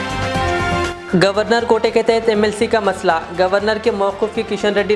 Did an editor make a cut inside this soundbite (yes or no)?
yes